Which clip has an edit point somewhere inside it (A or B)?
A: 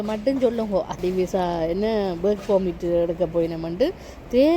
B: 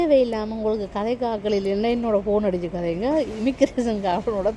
A